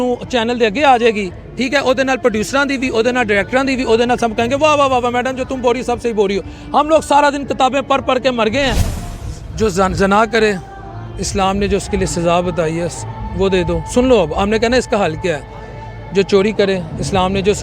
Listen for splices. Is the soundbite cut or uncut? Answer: cut